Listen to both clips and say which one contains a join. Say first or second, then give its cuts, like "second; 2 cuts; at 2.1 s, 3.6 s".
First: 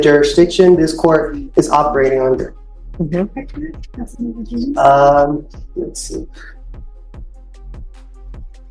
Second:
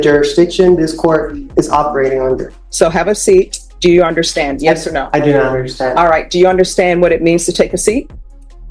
second; 2 cuts; at 2.6 s, 3.6 s